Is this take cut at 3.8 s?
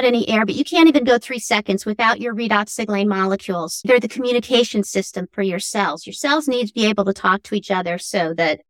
yes; 1 cut; at 3.8 s

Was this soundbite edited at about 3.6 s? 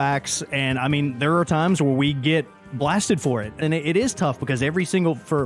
yes; 1 cut; at 3.6 s

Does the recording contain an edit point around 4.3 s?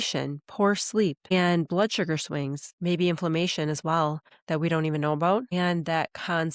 yes; 4 cuts; at 1.3 s, 2.6 s, 4.3 s, 5.5 s

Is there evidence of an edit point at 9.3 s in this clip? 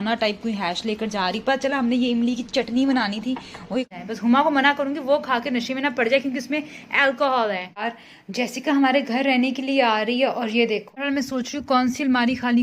no; 3 cuts; at 3.9 s, 7.8 s, 11.0 s

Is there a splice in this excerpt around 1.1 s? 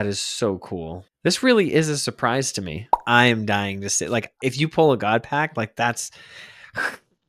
yes; 2 cuts; at 1.1 s, 3.0 s

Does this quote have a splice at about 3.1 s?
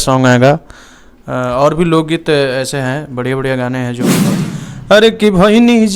no; 1 cut; at 4.4 s

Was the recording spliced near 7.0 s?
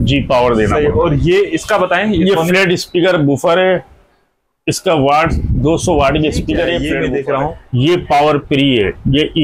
yes; 1 cut; at 7.0 s

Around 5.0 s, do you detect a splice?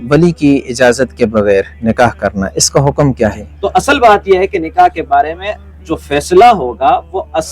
no; 1 cut; at 3.5 s

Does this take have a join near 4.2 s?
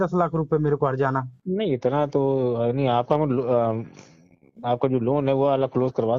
no; 1 cut; at 1.4 s

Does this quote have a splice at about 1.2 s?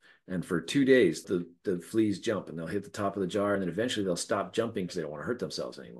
yes; 3 cuts; at 1.2 s, 3.6 s, 4.9 s

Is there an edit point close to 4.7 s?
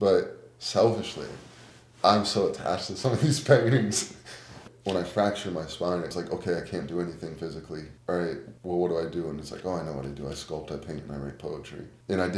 yes; 1 cut; at 4.7 s

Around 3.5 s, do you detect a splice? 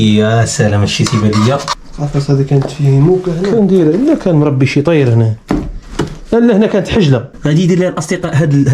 no; 2 cuts; at 1.8 s, 7.4 s

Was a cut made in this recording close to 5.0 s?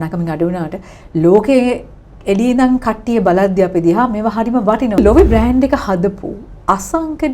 yes; 1 cut; at 5.0 s

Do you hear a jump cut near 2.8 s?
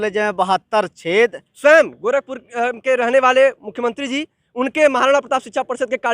no; 1 cut; at 1.5 s

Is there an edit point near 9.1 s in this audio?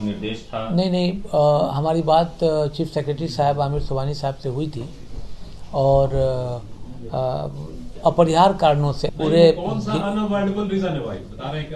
yes; 1 cut; at 9.1 s

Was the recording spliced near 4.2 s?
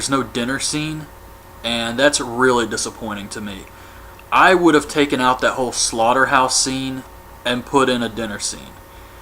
yes; 1 cut; at 4.2 s

